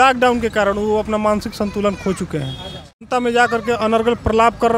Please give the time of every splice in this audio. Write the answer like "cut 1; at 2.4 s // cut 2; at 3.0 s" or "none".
cut 1; at 3.1 s